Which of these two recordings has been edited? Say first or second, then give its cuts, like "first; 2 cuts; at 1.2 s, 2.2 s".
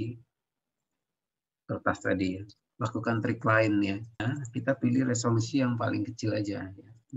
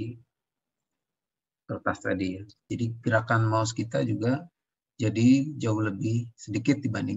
second; 1 cut; at 2.6 s